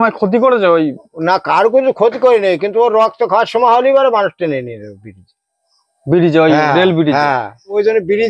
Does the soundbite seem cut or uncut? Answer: uncut